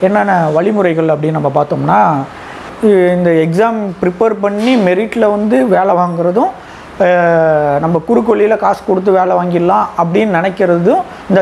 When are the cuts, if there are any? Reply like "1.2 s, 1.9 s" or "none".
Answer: 2.7 s